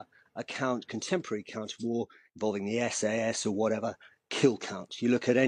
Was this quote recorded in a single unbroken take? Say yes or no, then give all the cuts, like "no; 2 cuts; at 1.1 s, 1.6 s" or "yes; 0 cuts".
yes; 0 cuts